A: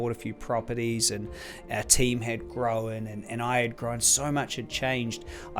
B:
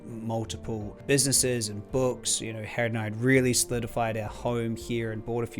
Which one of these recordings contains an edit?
B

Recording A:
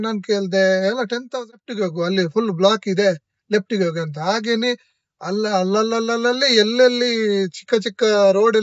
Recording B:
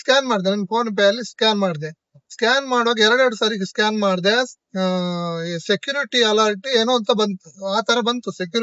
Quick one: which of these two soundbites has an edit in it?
A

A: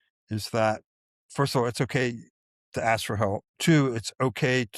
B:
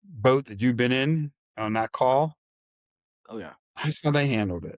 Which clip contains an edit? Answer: A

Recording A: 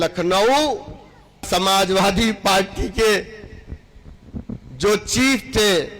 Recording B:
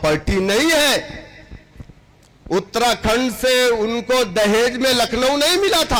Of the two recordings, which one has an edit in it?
A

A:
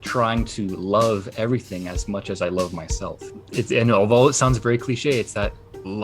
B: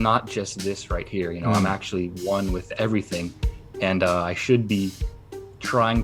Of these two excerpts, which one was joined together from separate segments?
A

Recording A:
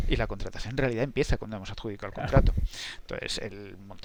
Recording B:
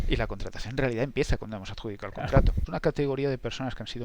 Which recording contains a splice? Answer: B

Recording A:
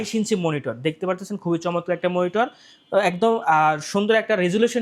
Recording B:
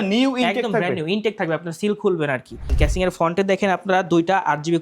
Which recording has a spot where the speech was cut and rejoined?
B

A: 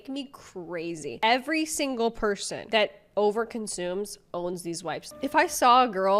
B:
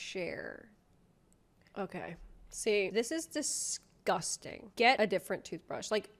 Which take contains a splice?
A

